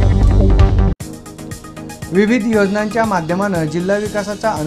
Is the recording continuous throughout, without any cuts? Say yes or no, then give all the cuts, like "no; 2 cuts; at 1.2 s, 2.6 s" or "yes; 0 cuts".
no; 1 cut; at 2.0 s